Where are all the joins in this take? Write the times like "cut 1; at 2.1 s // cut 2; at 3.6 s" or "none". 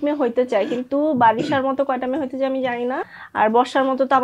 cut 1; at 3.2 s